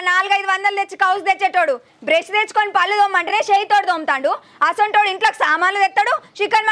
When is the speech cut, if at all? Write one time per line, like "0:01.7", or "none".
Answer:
none